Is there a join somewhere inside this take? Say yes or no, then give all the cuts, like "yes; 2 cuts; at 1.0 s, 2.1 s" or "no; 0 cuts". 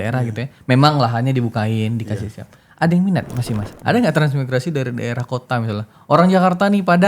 yes; 1 cut; at 3.7 s